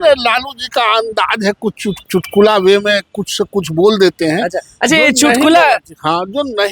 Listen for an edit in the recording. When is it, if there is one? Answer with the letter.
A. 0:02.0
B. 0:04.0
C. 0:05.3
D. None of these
A